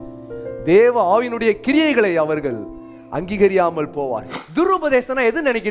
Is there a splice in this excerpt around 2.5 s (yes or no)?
no